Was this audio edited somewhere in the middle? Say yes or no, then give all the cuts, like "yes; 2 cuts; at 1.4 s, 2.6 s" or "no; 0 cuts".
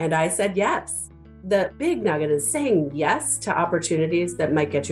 yes; 1 cut; at 1.3 s